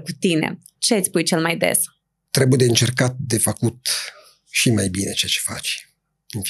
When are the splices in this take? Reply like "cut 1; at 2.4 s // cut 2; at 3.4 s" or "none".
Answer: none